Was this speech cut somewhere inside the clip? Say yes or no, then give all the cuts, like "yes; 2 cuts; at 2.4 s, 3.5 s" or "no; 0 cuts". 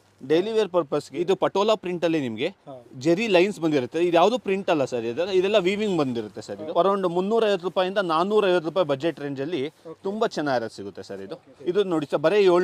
yes; 3 cuts; at 1.1 s, 6.5 s, 11.5 s